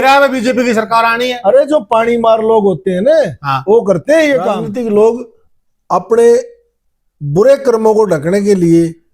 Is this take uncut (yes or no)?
no